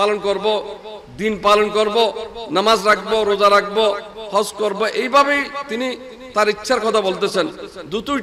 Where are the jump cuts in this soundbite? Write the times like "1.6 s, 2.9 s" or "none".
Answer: none